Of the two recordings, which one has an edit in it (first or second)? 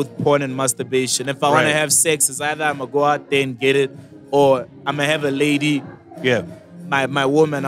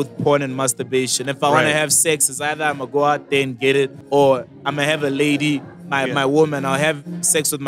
second